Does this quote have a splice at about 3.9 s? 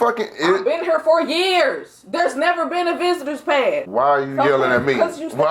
yes; 1 cut; at 3.9 s

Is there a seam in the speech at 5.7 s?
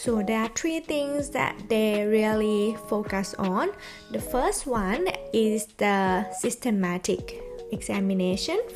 no; 0 cuts

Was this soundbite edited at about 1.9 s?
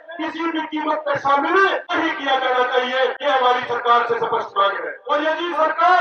yes; 3 cuts; at 1.9 s, 3.2 s, 4.9 s

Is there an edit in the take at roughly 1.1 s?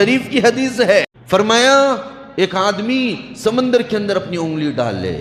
yes; 1 cut; at 1.1 s

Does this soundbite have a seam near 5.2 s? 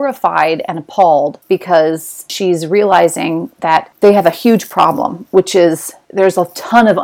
no; 1 cut; at 2.3 s

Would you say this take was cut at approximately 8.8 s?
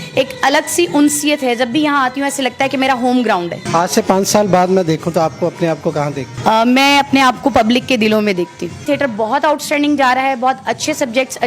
yes; 3 cuts; at 3.6 s, 6.3 s, 8.8 s

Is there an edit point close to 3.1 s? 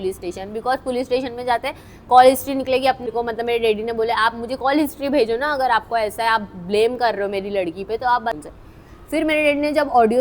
yes; 2 cuts; at 3.1 s, 8.4 s

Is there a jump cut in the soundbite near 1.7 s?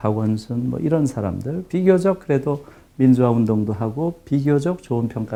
no; 0 cuts

